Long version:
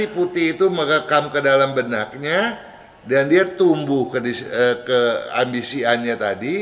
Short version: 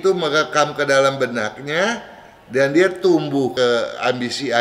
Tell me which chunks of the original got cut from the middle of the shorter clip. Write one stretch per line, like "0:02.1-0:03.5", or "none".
0:04.1-0:04.8